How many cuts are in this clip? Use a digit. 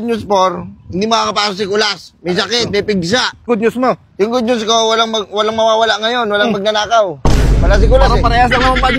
1